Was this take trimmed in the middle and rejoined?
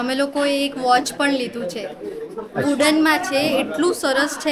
no; 0 cuts

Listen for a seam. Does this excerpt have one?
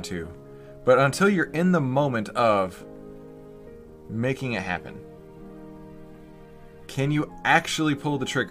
no; 0 cuts

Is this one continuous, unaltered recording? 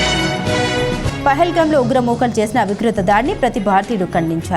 no; 1 cut; at 1.2 s

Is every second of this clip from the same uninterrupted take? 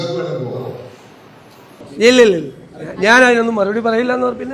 no; 1 cut; at 1.8 s

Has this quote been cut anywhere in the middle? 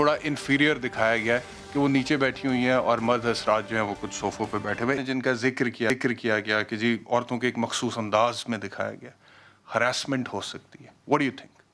no; 0 cuts

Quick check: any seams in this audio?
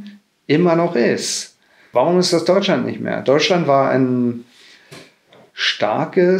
yes; 1 cut; at 1.9 s

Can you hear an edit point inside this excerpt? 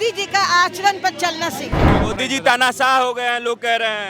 yes; 1 cut; at 1.9 s

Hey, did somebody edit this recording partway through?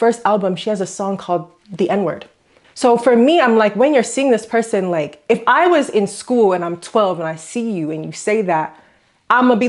no; 0 cuts

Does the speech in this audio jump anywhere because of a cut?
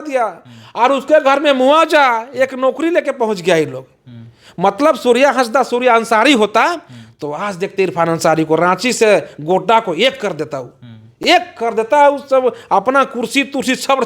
no; 0 cuts

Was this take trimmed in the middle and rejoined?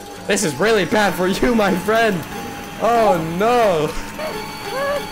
yes; 1 cut; at 4.1 s

